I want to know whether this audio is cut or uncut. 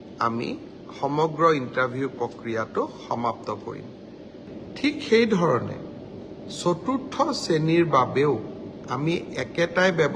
cut